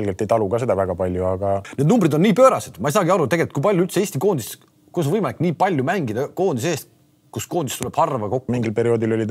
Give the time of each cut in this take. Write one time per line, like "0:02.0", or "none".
0:01.7
0:08.5